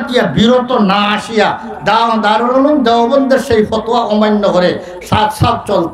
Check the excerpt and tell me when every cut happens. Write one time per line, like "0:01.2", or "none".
none